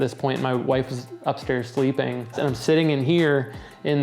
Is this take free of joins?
no; 1 cut; at 2.4 s

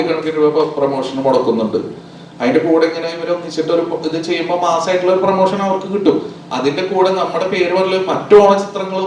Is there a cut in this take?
no; 0 cuts

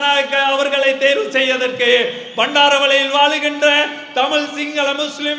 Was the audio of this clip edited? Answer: no; 0 cuts

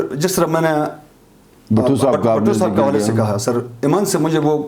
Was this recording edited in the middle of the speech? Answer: no; 0 cuts

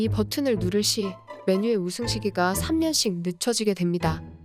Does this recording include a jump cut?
no; 0 cuts

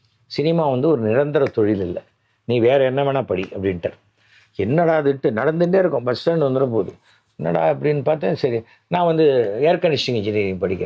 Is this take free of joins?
yes; 0 cuts

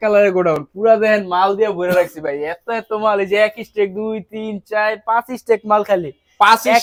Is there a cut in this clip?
no; 0 cuts

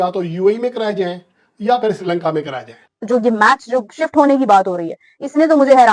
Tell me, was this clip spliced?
yes; 1 cut; at 2.9 s

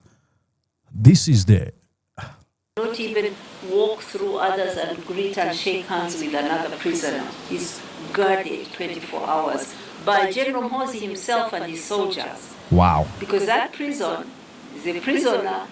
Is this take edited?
no; 0 cuts

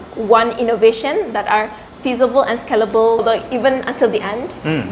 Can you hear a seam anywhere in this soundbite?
yes; 1 cut; at 3.2 s

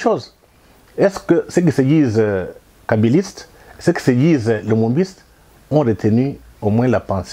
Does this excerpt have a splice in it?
no; 0 cuts

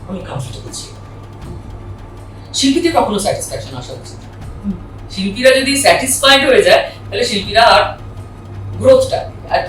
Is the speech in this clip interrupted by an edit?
yes; 1 cut; at 1.5 s

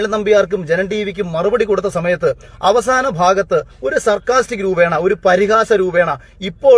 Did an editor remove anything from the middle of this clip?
no; 0 cuts

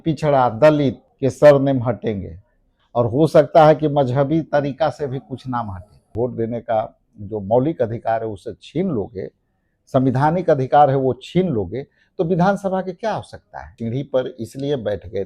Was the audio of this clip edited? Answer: yes; 3 cuts; at 1.1 s, 6.0 s, 13.7 s

